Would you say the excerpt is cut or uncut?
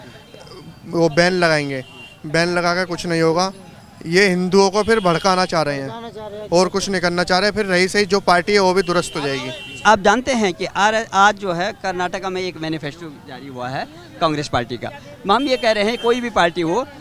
uncut